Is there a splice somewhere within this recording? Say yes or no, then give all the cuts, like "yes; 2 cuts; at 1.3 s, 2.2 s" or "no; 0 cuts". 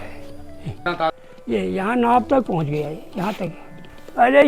yes; 1 cut; at 1.1 s